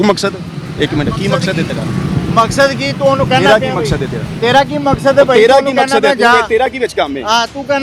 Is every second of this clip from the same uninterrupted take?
yes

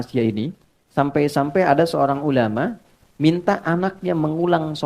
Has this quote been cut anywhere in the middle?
no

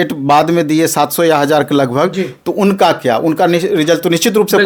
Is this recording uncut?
yes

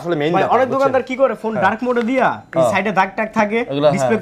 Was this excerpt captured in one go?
yes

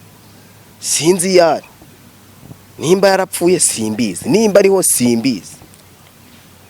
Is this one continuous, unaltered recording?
yes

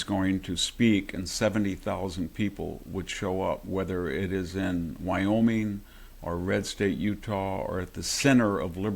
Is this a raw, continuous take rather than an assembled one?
yes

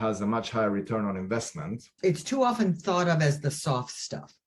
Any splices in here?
yes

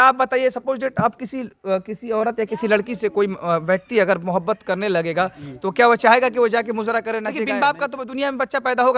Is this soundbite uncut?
no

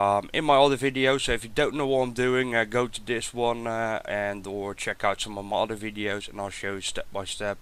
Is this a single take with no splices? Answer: no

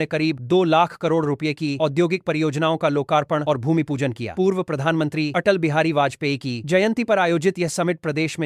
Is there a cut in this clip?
no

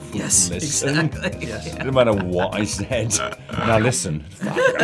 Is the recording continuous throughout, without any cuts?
yes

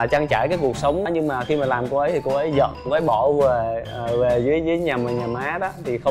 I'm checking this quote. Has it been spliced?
no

